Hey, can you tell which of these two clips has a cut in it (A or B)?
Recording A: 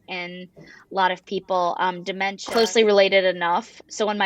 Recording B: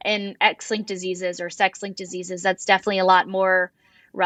A